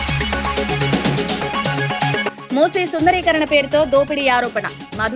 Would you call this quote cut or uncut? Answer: cut